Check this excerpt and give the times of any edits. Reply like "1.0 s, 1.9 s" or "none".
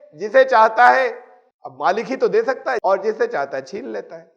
2.8 s